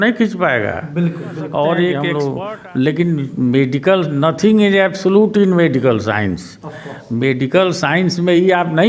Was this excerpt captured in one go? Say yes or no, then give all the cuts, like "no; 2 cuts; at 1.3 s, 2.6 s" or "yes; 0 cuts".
no; 1 cut; at 2.1 s